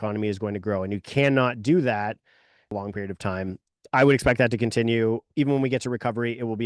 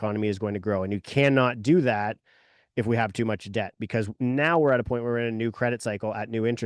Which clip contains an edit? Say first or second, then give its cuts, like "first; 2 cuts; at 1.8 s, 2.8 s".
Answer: first; 1 cut; at 2.7 s